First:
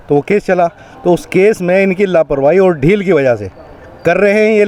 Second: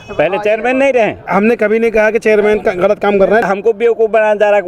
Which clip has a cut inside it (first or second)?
second